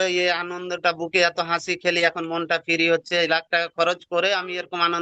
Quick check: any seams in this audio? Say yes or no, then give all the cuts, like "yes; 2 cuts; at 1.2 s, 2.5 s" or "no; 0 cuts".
no; 0 cuts